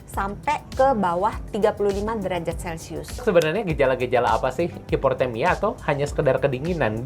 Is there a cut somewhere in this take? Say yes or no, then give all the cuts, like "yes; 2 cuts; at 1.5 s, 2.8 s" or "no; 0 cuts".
yes; 2 cuts; at 3.2 s, 4.8 s